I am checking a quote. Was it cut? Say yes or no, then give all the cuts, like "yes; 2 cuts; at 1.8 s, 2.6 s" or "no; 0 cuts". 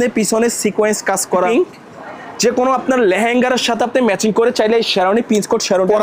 yes; 1 cut; at 1.5 s